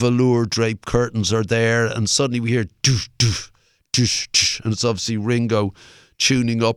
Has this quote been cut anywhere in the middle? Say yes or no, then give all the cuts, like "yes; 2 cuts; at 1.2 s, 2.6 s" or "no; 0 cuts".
no; 0 cuts